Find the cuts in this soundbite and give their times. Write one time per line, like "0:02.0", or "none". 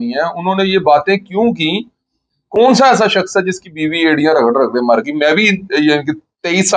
none